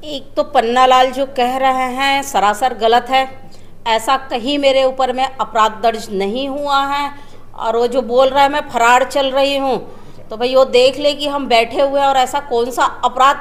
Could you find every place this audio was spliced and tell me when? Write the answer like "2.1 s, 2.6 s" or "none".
none